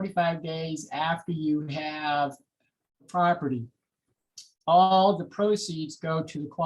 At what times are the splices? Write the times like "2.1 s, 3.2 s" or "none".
3.0 s